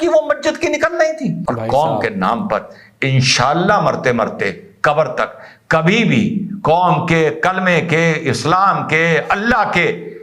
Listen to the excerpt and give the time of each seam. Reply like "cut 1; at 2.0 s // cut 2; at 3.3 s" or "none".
cut 1; at 1.5 s